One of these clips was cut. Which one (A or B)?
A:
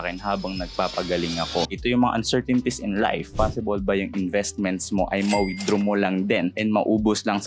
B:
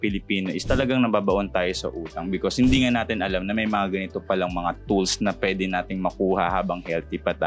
A